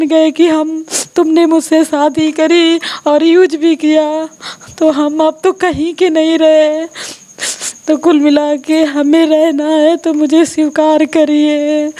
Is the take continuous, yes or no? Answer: yes